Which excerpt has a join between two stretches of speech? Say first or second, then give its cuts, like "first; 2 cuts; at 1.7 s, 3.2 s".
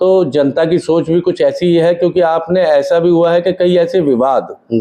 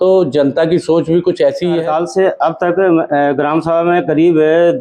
second; 1 cut; at 1.8 s